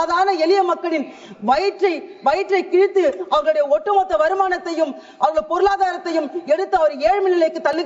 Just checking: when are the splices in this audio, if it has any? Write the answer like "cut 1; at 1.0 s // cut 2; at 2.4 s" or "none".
none

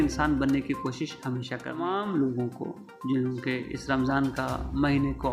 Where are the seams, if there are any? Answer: cut 1; at 1.7 s

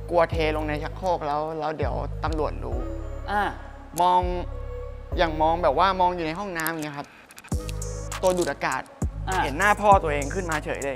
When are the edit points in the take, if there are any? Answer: none

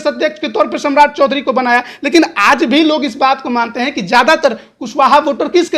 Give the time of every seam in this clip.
none

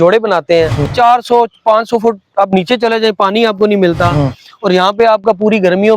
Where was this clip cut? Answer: cut 1; at 0.9 s

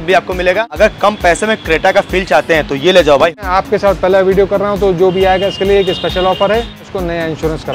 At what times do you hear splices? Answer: cut 1; at 0.8 s // cut 2; at 3.4 s // cut 3; at 6.8 s

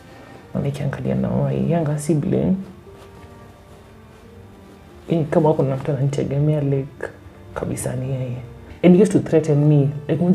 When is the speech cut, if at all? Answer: cut 1; at 8.6 s

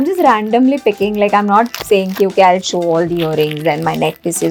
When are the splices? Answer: none

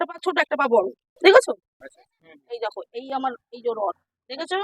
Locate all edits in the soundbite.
cut 1; at 2.2 s

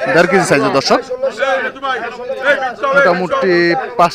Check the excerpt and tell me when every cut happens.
none

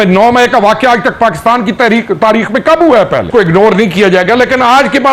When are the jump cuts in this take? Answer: cut 1; at 3.3 s

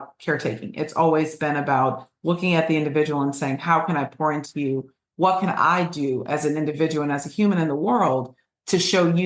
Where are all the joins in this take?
none

